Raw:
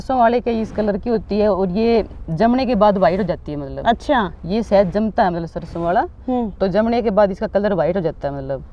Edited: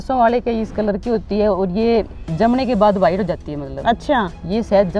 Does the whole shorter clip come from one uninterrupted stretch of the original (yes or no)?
yes